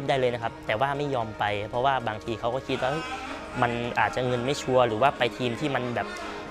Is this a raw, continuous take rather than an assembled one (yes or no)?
yes